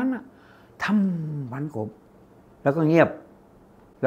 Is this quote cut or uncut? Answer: uncut